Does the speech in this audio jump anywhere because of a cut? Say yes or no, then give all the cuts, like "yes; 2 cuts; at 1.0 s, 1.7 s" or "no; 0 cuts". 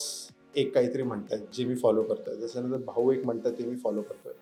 no; 0 cuts